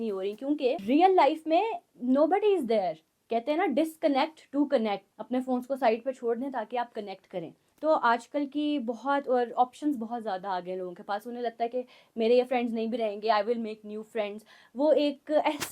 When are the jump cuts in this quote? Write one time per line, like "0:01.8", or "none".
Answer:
0:00.8
0:03.1
0:05.1
0:07.6